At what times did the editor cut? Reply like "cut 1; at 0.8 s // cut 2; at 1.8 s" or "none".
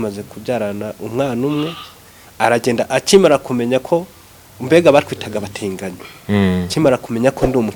none

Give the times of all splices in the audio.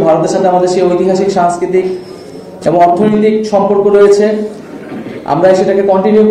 none

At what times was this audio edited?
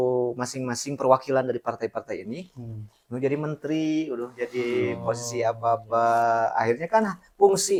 none

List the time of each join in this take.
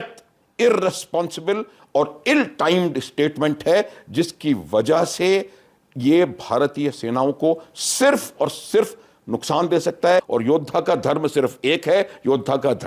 cut 1; at 10.3 s

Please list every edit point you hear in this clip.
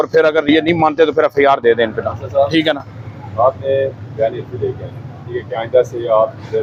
none

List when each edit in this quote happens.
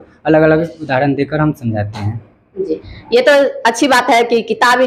none

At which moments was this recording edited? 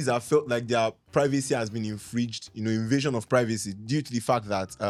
none

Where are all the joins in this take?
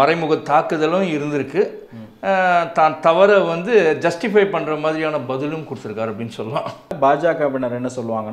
cut 1; at 6.9 s

